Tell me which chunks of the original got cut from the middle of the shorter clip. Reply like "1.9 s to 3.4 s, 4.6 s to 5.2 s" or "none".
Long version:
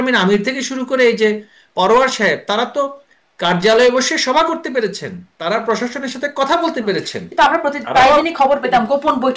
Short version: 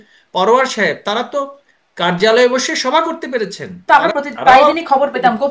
5.1 s to 7.2 s

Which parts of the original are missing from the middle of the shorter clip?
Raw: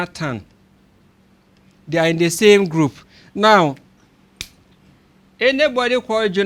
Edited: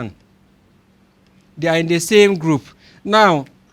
none

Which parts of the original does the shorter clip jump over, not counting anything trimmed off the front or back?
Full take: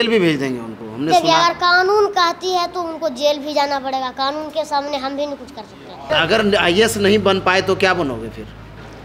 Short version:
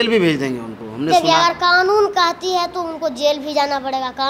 none

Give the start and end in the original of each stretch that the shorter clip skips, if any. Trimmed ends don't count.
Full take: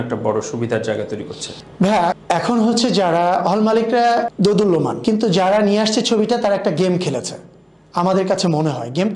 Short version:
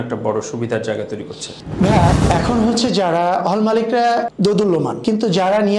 none

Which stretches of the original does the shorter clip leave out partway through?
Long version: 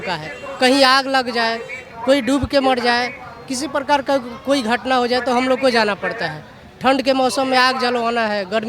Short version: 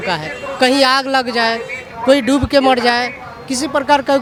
none

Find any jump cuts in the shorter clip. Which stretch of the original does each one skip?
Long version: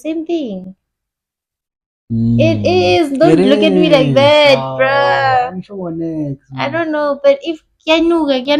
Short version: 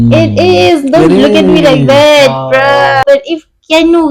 5.3 s to 7.2 s

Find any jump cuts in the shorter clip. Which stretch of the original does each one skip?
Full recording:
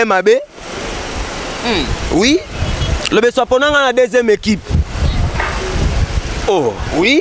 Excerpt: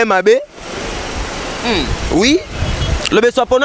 none

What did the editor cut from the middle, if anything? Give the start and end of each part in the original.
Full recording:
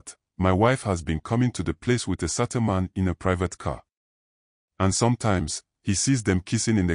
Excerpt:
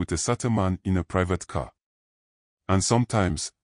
none

